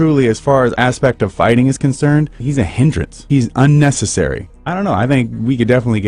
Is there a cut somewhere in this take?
no; 0 cuts

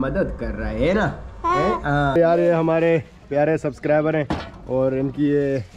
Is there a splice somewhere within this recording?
yes; 1 cut; at 2.1 s

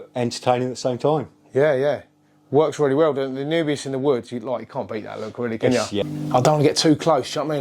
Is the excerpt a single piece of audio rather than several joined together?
no; 1 cut; at 6.0 s

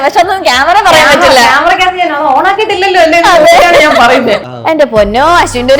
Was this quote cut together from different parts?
yes; 1 cut; at 4.5 s

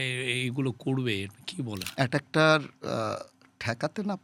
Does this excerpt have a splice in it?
yes; 1 cut; at 1.8 s

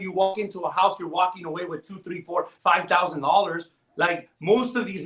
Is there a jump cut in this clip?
no; 0 cuts

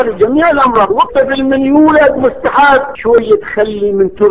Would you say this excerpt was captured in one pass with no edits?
no; 1 cut; at 2.9 s

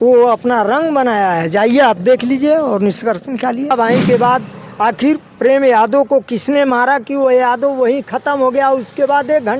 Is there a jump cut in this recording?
yes; 1 cut; at 3.7 s

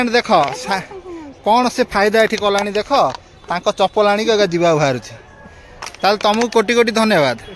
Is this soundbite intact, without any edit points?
yes; 0 cuts

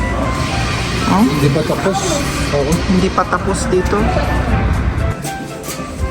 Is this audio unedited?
no; 1 cut; at 5.1 s

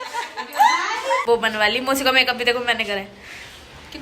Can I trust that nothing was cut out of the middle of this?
no; 1 cut; at 1.2 s

